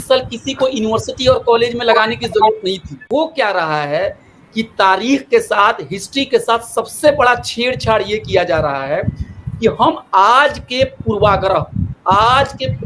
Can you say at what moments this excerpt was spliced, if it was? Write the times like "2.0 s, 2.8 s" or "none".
3.0 s

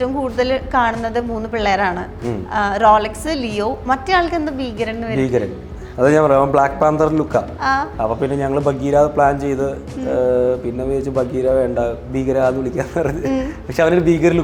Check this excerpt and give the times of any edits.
none

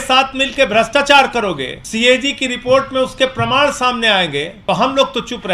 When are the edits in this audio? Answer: 1.8 s, 4.5 s

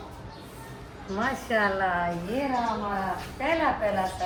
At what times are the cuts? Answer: none

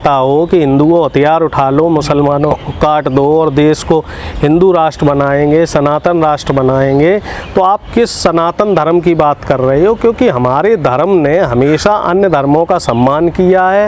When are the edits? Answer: none

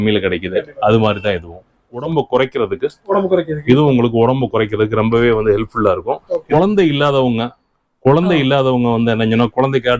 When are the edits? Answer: 2.0 s, 6.3 s

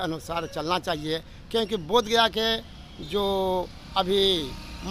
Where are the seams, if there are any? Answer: none

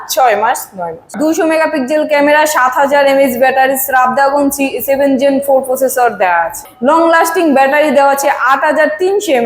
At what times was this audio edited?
1.1 s, 6.7 s

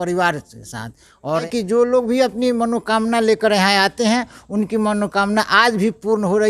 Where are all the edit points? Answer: 1.5 s

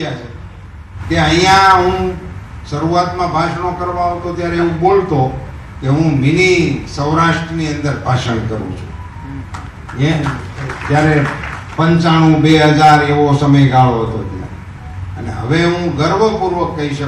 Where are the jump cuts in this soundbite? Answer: none

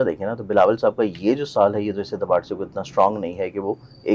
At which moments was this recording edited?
none

